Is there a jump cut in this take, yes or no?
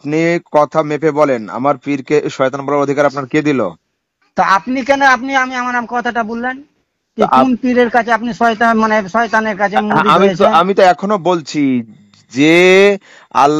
no